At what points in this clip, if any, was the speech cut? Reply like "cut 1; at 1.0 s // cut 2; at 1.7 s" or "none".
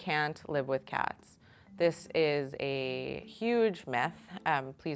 none